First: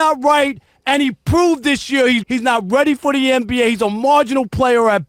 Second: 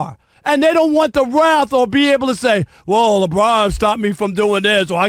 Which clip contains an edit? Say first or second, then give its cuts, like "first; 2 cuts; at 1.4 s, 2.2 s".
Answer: first; 1 cut; at 2.2 s